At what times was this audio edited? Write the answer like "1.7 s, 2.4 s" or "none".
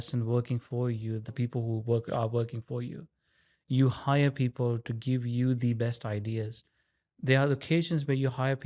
1.3 s